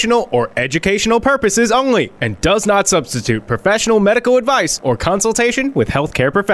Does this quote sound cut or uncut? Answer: uncut